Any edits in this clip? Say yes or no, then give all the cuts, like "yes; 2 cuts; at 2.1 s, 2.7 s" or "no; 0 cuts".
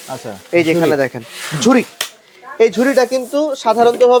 no; 0 cuts